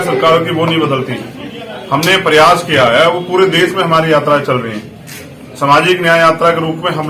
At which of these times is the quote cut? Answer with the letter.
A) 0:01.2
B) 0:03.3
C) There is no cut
C